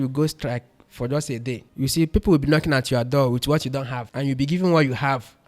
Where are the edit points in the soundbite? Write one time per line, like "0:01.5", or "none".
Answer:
0:01.7
0:04.0